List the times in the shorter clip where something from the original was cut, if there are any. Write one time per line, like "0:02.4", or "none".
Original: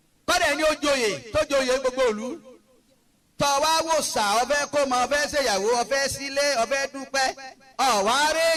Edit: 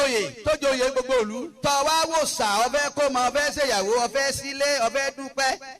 0:01.4